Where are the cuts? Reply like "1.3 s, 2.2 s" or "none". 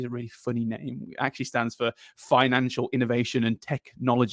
none